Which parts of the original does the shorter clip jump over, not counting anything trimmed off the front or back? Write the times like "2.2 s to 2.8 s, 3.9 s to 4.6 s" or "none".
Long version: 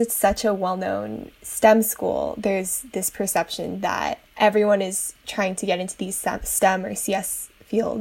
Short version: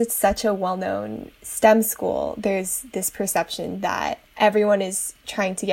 none